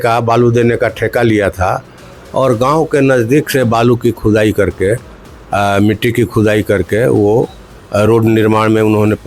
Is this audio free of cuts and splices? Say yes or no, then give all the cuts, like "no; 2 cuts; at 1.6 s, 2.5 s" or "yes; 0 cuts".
yes; 0 cuts